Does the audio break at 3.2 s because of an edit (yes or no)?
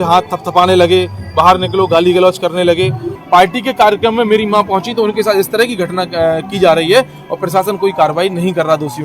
yes